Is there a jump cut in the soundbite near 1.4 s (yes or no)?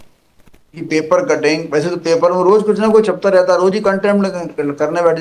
no